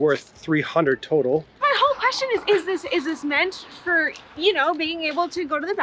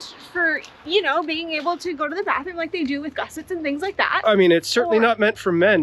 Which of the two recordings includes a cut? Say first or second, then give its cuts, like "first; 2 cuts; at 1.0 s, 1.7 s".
first; 1 cut; at 1.6 s